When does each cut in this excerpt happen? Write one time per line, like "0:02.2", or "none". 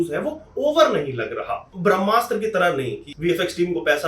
0:01.7
0:03.1